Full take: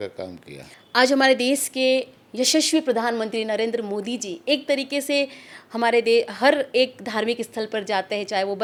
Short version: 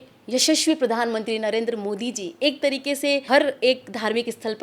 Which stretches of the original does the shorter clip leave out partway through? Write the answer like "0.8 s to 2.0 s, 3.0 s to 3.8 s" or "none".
5.3 s to 6.4 s